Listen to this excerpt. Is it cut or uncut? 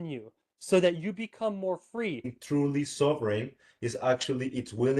cut